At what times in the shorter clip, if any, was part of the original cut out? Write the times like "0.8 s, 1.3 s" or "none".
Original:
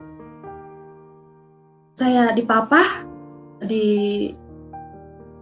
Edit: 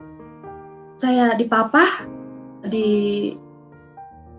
1.0 s